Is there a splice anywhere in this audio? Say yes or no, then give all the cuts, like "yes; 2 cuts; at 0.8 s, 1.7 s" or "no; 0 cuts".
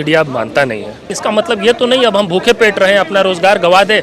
yes; 1 cut; at 1.1 s